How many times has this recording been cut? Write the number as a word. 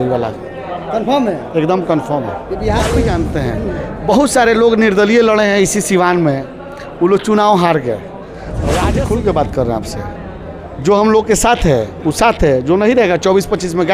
two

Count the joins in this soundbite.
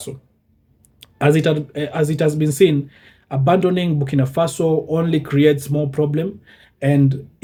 zero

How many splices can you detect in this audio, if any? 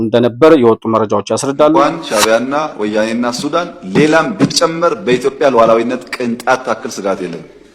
one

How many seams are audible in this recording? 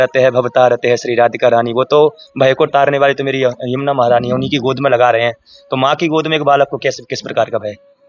zero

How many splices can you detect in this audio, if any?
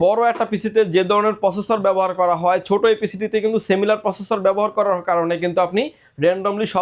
zero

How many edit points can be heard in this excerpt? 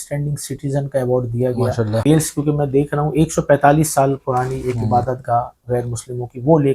one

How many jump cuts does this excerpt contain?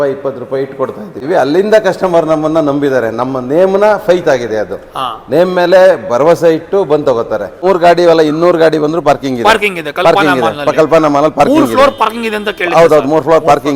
two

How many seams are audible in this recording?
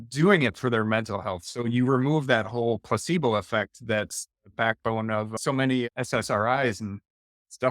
one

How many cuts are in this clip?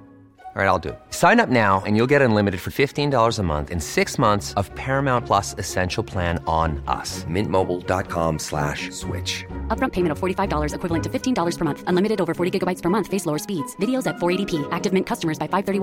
zero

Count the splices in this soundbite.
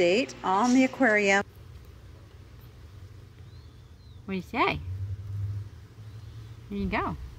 one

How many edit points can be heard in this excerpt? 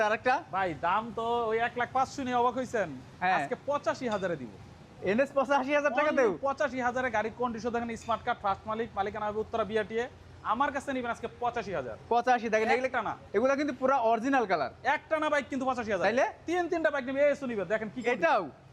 zero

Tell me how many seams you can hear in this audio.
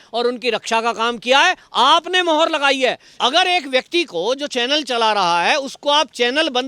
one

